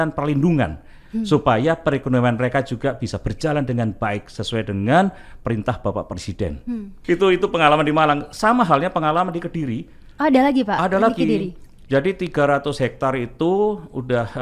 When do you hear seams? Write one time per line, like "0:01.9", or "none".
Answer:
none